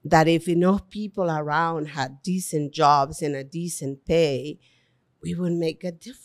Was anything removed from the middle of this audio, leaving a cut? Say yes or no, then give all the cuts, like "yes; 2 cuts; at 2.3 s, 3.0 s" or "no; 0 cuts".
no; 0 cuts